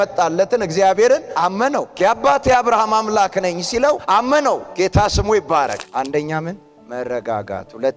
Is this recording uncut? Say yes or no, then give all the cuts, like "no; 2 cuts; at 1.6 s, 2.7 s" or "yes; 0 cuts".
no; 3 cuts; at 1.9 s, 4.0 s, 5.8 s